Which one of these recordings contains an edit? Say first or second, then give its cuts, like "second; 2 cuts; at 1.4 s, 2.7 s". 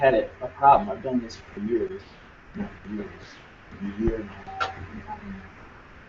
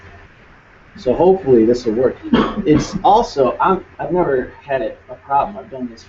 second; 1 cut; at 1.8 s